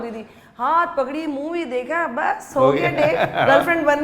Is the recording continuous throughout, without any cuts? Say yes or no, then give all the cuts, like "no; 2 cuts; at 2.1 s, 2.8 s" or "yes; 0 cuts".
yes; 0 cuts